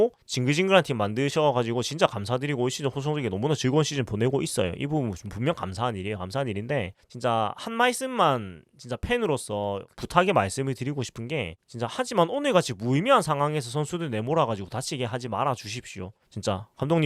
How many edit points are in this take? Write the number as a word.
zero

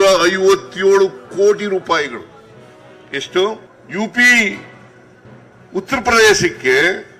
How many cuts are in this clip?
one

